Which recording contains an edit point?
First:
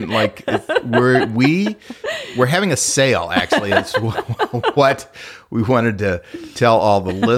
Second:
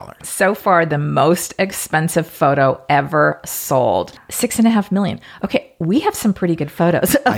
second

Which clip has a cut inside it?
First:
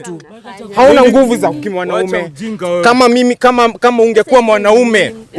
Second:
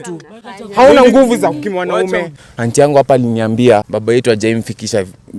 second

